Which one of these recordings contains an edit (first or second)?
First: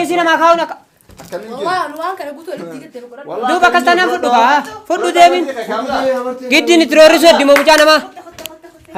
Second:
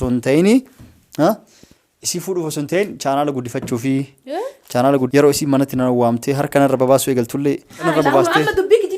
second